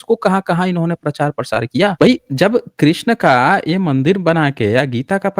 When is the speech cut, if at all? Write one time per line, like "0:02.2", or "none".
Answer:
0:01.9